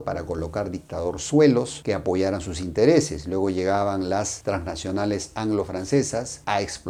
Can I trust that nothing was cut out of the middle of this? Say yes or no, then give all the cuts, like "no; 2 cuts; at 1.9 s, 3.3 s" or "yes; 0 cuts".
yes; 0 cuts